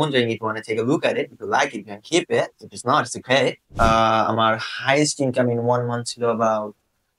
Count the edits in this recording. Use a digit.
1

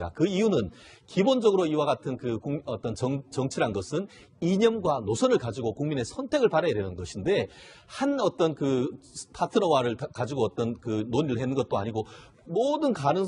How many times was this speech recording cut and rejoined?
1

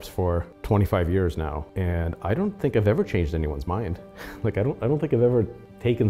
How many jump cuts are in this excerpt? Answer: 0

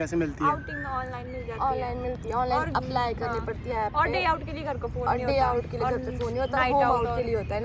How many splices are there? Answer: 0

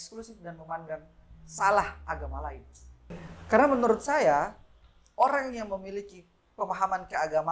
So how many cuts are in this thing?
1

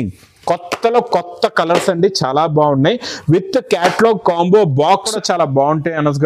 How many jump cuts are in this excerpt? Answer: 1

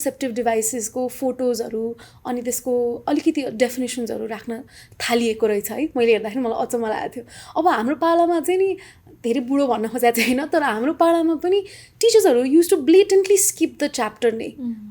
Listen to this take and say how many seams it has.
0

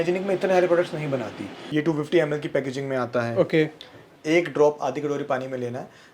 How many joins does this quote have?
2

